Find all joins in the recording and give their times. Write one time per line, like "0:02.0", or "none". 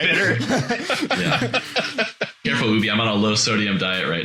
0:02.4